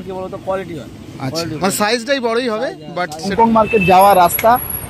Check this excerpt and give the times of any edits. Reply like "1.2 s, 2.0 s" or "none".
3.3 s